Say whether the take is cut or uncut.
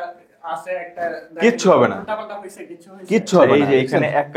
cut